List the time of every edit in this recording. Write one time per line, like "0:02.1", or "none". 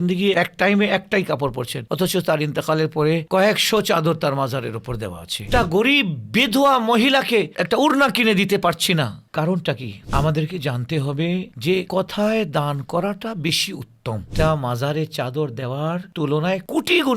0:05.4
0:10.1
0:14.3